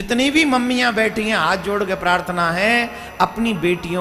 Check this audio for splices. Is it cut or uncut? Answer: uncut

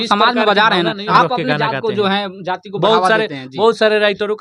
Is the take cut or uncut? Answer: cut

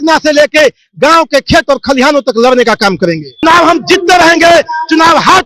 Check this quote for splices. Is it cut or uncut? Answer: cut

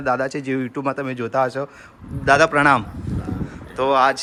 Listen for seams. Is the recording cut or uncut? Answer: uncut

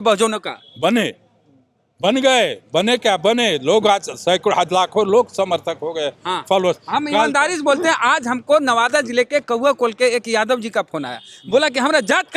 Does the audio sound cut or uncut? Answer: uncut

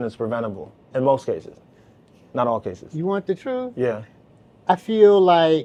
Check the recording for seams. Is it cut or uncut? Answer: uncut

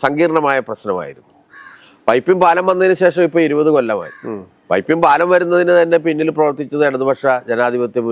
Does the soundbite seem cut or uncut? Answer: uncut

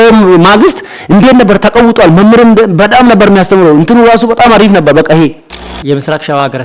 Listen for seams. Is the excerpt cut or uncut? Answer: cut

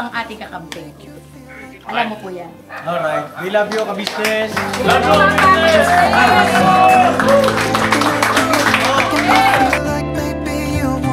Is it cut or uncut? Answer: cut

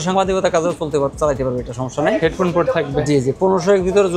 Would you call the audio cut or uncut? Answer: uncut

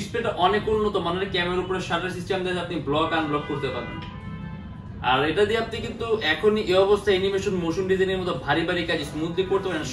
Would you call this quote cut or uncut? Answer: uncut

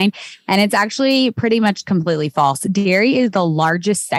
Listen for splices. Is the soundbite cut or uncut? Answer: uncut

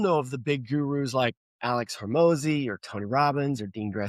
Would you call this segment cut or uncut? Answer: cut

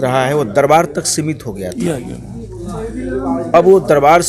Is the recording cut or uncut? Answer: uncut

